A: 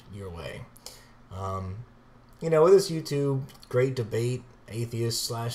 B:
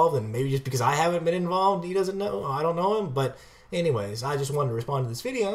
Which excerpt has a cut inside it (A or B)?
B